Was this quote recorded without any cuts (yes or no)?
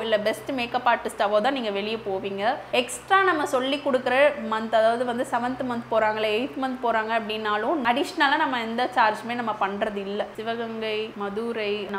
no